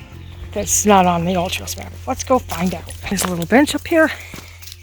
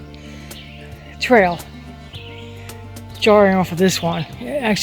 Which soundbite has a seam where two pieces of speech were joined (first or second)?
first